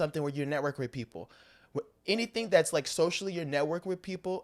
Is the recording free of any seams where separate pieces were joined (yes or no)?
yes